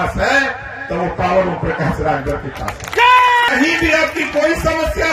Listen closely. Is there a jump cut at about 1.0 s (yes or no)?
no